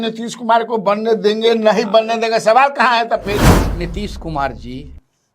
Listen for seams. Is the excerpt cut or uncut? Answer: cut